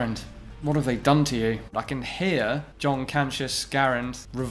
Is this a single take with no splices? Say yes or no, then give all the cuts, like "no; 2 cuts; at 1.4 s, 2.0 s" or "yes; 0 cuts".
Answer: no; 1 cut; at 1.7 s